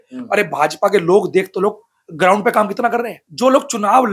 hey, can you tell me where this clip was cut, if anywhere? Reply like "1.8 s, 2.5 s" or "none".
3.2 s